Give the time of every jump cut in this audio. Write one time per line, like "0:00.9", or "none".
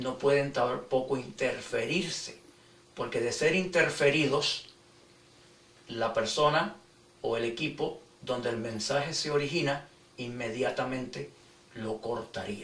0:06.4